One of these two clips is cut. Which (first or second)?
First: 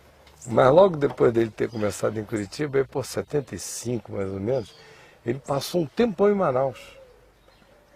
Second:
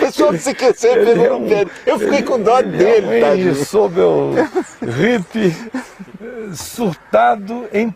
first